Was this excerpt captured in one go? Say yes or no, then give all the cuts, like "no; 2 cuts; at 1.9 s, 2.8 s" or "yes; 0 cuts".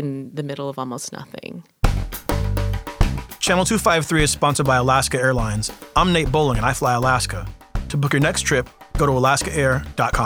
no; 1 cut; at 1.8 s